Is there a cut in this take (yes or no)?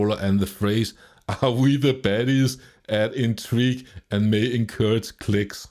no